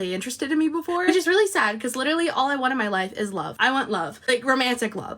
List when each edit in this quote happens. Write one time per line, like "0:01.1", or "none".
none